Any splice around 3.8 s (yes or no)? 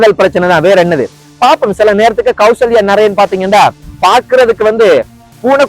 no